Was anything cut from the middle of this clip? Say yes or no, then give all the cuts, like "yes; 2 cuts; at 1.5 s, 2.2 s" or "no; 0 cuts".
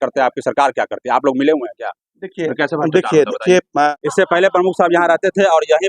yes; 1 cut; at 3.9 s